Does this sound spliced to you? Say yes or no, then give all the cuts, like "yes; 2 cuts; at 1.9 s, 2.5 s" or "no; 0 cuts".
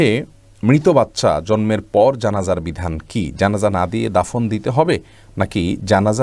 no; 0 cuts